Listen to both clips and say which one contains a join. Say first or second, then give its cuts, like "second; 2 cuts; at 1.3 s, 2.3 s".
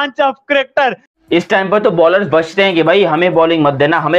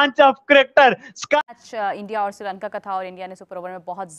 first; 1 cut; at 1.1 s